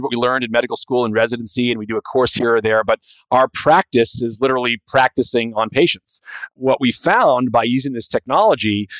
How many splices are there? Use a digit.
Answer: 1